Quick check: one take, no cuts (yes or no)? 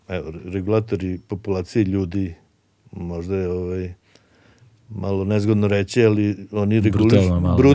yes